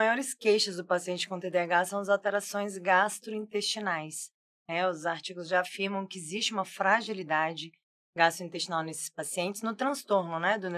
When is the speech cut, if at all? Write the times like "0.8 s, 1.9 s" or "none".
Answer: none